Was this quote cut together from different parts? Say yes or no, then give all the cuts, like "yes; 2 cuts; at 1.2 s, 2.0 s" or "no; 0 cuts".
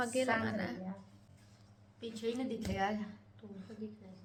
no; 0 cuts